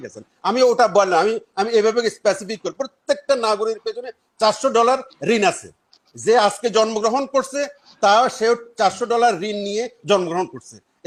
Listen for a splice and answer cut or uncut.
uncut